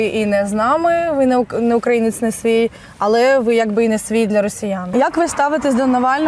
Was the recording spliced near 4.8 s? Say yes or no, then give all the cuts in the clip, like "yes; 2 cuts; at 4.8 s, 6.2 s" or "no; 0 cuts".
yes; 1 cut; at 4.8 s